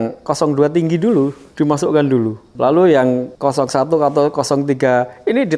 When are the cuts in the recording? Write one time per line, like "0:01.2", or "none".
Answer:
0:02.5
0:03.3

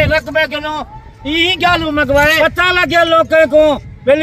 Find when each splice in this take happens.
0:02.3

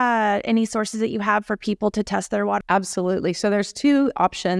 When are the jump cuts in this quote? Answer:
0:02.6

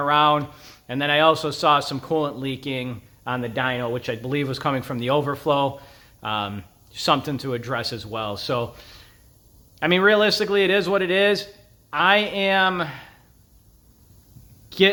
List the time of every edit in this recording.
none

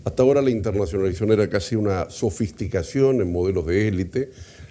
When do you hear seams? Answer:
none

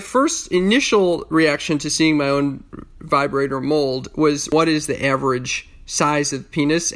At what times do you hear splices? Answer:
0:04.5

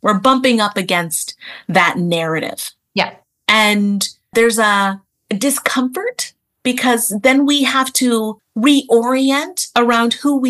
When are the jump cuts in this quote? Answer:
0:04.3
0:05.1
0:08.4

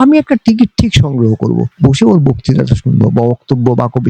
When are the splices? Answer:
0:01.7

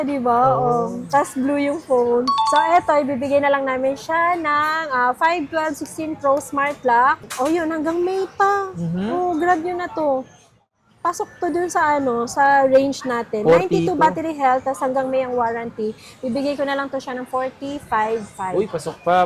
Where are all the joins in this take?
none

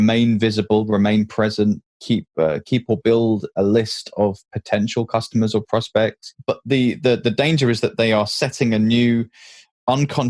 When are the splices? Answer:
0:06.3

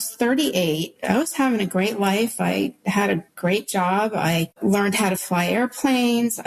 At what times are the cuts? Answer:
0:00.9
0:04.5

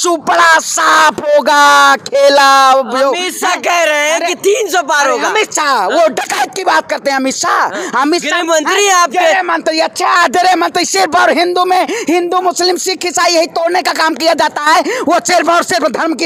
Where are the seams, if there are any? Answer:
none

